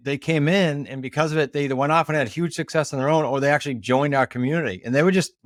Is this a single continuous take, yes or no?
yes